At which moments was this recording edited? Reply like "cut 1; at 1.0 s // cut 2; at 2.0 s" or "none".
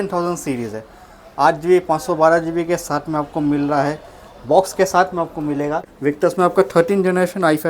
cut 1; at 5.9 s